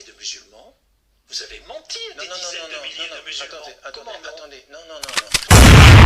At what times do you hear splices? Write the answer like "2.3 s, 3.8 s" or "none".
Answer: 5.2 s